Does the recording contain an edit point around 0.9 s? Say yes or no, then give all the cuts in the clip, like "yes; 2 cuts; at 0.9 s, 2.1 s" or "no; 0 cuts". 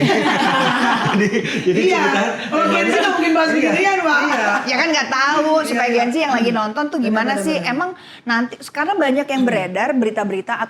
no; 0 cuts